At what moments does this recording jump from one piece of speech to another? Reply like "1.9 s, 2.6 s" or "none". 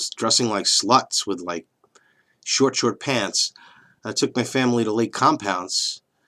1.7 s